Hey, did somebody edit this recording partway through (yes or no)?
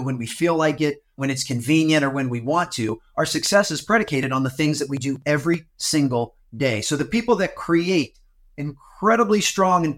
yes